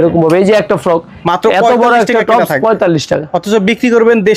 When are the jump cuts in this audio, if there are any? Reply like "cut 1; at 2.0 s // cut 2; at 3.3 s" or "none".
cut 1; at 1.1 s